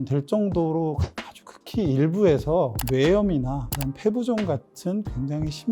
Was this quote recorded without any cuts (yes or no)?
no